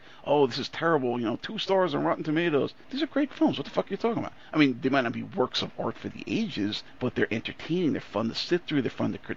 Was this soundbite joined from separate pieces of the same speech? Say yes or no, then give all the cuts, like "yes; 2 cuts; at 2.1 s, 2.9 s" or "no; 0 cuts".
yes; 1 cut; at 2.8 s